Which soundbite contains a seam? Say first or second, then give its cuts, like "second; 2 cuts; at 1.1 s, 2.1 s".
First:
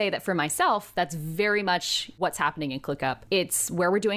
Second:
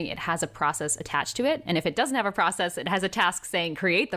first; 2 cuts; at 2.2 s, 3.2 s